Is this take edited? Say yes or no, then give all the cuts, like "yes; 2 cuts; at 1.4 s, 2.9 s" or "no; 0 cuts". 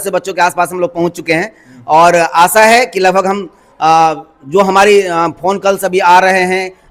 no; 0 cuts